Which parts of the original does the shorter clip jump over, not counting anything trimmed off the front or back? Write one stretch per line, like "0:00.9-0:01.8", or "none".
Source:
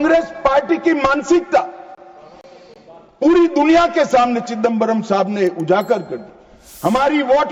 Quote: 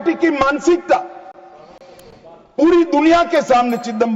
none